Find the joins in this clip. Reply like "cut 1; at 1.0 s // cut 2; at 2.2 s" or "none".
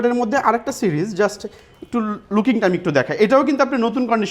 none

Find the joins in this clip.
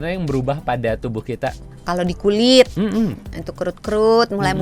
cut 1; at 1.7 s

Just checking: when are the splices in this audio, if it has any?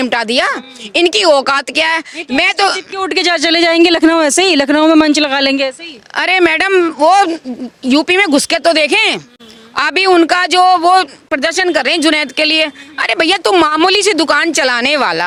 none

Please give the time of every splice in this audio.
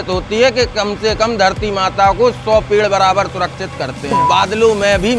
cut 1; at 4.2 s

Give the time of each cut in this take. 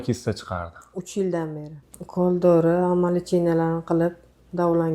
cut 1; at 1.7 s

